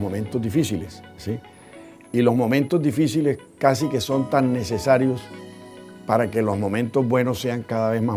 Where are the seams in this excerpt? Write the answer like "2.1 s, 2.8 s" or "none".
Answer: none